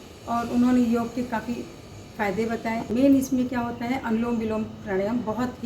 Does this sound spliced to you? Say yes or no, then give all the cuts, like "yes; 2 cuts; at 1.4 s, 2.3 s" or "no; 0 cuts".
yes; 1 cut; at 2.9 s